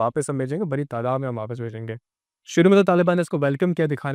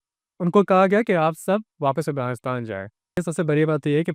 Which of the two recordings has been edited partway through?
second; 1 cut; at 3.2 s

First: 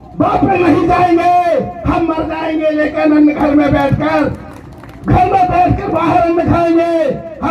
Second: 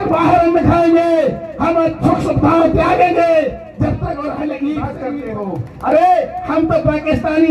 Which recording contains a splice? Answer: second; 1 cut; at 5.2 s

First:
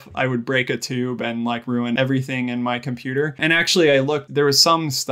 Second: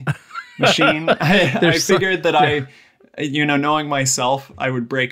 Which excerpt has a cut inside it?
first; 3 cuts; at 2.0 s, 3.4 s, 4.3 s

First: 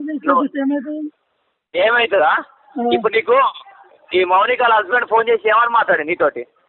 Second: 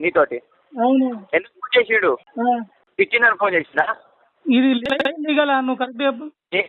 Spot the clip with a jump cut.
second; 1 cut; at 2.3 s

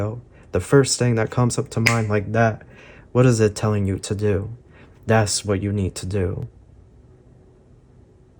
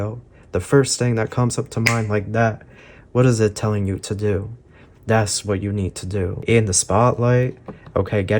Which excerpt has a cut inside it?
second; 1 cut; at 6.4 s

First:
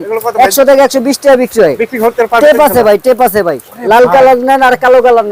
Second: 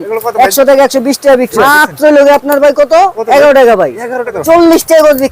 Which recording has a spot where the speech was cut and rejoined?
second; 2 cuts; at 1.6 s, 4.3 s

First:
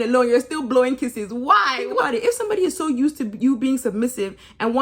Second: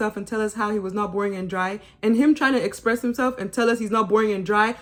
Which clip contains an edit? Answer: first; 1 cut; at 2.0 s

